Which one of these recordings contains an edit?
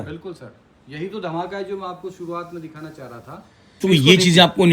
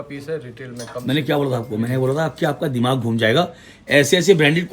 first; 1 cut; at 3.8 s

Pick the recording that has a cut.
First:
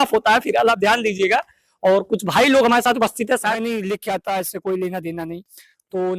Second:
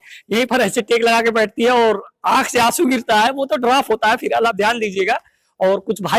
first; 1 cut; at 3.6 s

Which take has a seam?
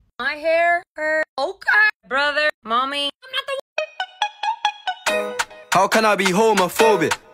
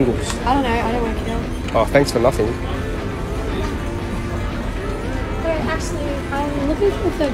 first; 1 cut; at 3.6 s

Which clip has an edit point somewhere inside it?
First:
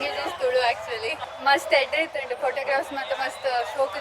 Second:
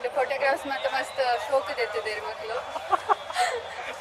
first; 1 cut; at 1.1 s

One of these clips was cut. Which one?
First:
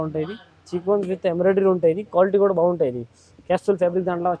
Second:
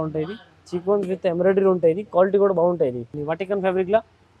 second; 1 cut; at 3.1 s

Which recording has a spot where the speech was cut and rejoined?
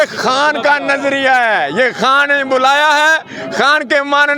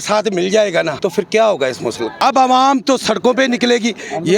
second; 2 cuts; at 0.9 s, 2.1 s

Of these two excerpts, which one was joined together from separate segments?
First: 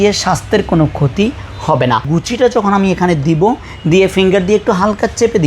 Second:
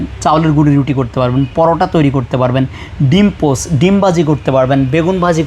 first; 1 cut; at 2.1 s

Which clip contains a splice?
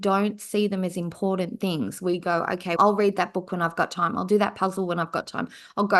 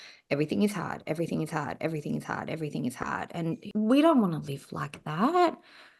second; 1 cut; at 3.7 s

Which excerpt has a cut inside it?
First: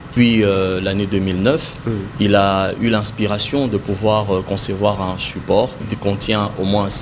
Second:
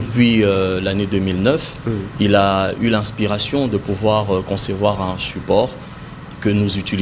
first; 1 cut; at 5.9 s

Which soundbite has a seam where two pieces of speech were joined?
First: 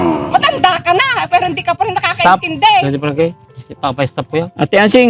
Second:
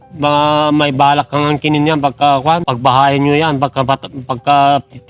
second; 1 cut; at 2.7 s

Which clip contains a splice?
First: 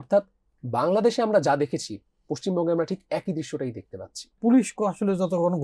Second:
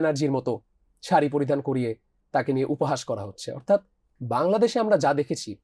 first; 1 cut; at 4.4 s

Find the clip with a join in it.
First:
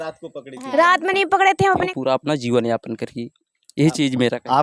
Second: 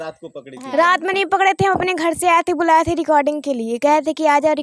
first; 1 cut; at 1.9 s

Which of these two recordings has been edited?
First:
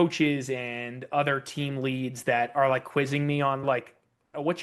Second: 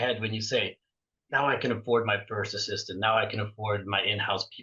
first; 1 cut; at 3.6 s

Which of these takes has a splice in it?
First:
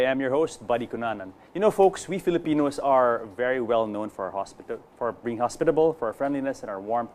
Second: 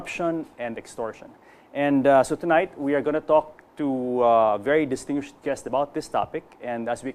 second; 1 cut; at 5.4 s

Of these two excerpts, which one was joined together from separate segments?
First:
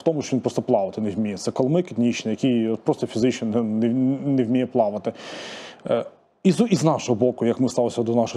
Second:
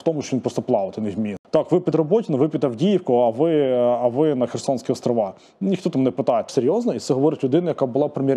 second; 2 cuts; at 1.4 s, 6.5 s

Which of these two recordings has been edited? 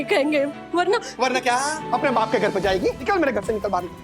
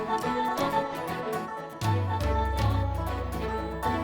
first; 2 cuts; at 1.8 s, 3.0 s

